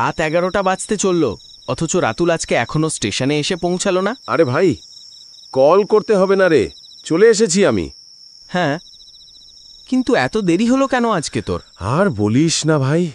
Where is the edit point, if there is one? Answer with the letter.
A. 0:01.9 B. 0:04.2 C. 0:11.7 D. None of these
B